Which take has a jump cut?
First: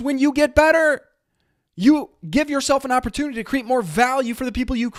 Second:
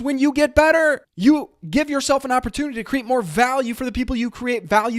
second; 1 cut; at 1.1 s

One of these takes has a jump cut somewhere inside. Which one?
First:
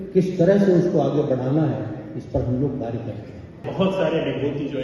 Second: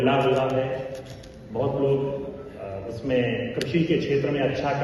first; 1 cut; at 3.7 s

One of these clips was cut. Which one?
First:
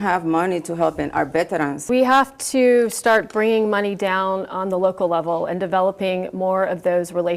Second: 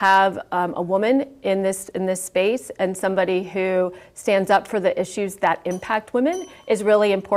first; 1 cut; at 1.8 s

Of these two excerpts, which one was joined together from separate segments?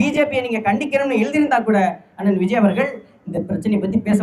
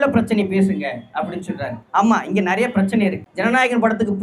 second; 2 cuts; at 1.8 s, 3.3 s

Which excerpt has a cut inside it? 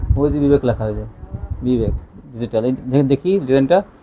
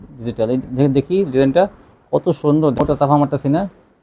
second; 1 cut; at 2.8 s

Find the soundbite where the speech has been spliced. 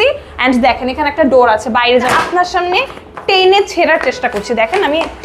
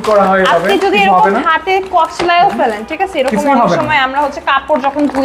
first; 1 cut; at 2.1 s

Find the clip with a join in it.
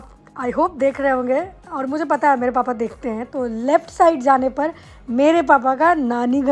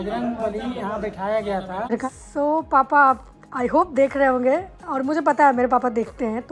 second; 1 cut; at 1.9 s

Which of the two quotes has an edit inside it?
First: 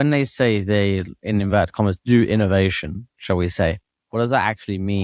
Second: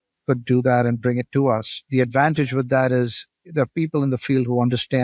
second; 1 cut; at 1.8 s

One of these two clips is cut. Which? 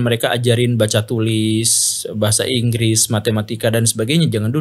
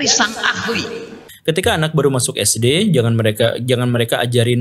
second; 1 cut; at 1.2 s

